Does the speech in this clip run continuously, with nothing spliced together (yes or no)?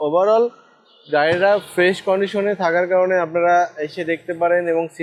yes